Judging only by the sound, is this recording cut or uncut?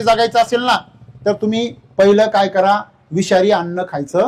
uncut